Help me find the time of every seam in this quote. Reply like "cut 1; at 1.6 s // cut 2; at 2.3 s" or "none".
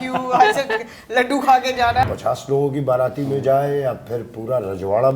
cut 1; at 2.0 s